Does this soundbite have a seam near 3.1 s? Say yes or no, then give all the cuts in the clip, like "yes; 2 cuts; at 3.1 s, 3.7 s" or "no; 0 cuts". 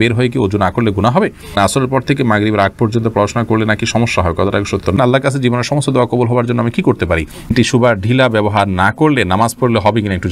no; 3 cuts; at 1.5 s, 5.0 s, 7.5 s